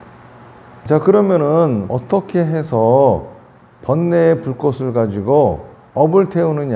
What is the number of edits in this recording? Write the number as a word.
two